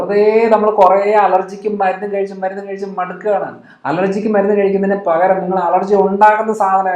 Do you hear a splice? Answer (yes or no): no